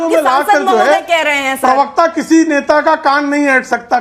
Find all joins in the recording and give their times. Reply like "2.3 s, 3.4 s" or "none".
none